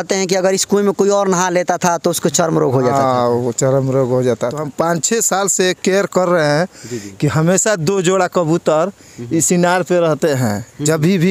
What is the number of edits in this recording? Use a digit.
1